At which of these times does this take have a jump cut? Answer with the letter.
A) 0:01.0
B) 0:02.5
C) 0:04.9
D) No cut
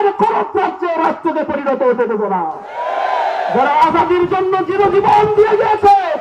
D